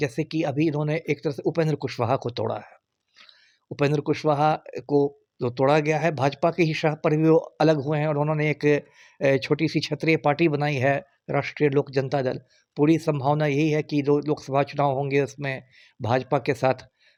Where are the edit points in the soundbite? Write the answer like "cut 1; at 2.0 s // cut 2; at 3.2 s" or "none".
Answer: none